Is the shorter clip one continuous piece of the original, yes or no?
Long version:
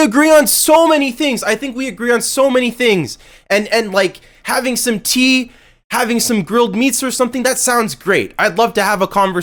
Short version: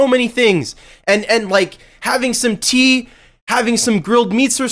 yes